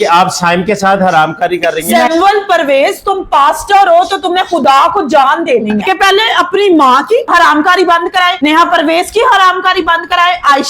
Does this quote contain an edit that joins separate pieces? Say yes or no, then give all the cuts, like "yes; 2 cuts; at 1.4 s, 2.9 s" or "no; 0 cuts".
yes; 2 cuts; at 1.8 s, 5.8 s